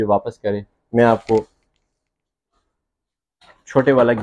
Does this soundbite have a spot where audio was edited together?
no; 0 cuts

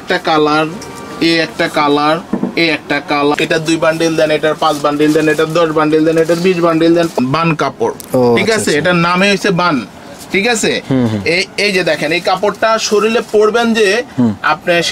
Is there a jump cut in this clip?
yes; 2 cuts; at 3.3 s, 7.2 s

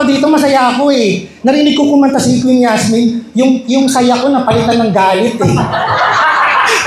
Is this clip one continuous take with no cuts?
yes; 0 cuts

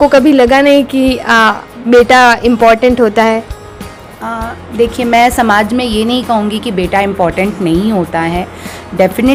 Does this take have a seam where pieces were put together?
no; 0 cuts

